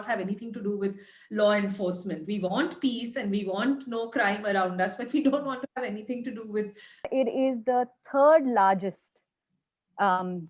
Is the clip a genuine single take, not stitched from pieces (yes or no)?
no